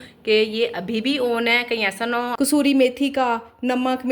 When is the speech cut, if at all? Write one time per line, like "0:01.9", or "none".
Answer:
0:02.4

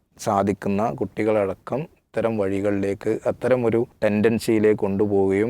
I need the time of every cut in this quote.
0:03.9

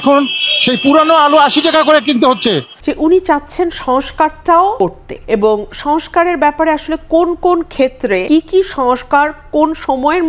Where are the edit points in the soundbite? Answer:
0:02.7
0:04.9
0:08.2

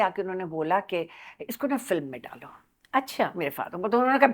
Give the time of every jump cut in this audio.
none

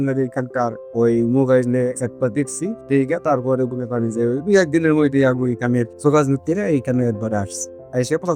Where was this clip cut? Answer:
none

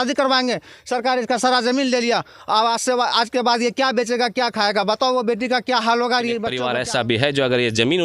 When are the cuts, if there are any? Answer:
0:06.6

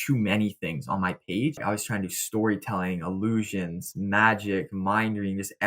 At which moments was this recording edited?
0:01.6

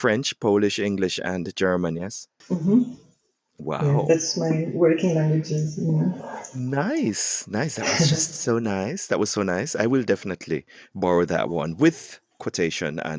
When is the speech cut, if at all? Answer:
0:12.2

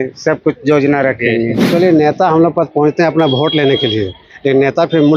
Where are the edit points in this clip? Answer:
0:01.7

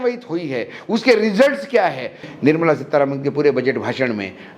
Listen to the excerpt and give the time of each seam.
0:02.3

